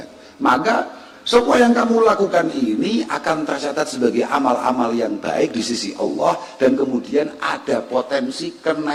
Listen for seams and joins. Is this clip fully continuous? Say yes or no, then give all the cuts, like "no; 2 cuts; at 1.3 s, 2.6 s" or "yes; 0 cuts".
yes; 0 cuts